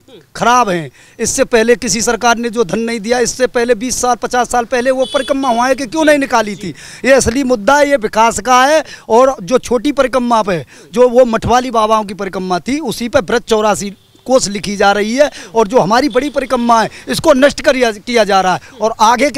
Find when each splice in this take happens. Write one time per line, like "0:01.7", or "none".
none